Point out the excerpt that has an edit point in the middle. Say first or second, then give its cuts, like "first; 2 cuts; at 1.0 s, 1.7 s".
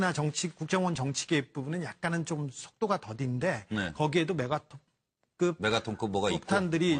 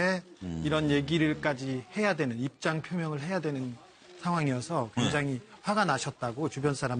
first; 1 cut; at 4.8 s